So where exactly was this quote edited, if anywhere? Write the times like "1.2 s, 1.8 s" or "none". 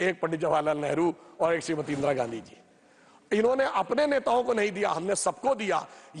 none